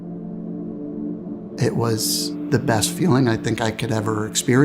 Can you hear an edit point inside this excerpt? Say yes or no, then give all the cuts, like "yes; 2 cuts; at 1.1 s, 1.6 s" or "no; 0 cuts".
yes; 1 cut; at 1.5 s